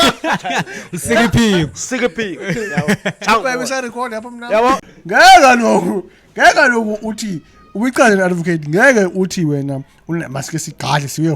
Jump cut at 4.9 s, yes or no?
yes